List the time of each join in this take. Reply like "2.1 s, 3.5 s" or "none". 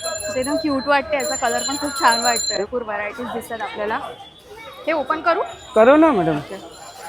none